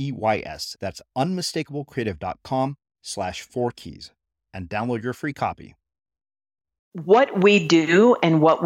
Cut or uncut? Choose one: cut